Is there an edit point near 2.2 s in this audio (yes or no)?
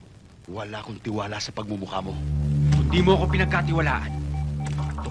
yes